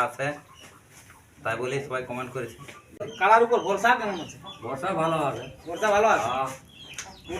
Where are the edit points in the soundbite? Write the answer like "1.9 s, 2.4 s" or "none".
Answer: 3.1 s